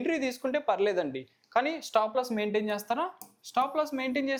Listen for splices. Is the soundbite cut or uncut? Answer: uncut